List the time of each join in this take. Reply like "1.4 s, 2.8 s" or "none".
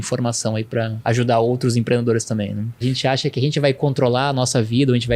0.9 s, 2.8 s